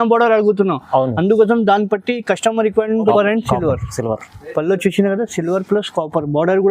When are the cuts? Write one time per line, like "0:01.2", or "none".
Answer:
0:03.1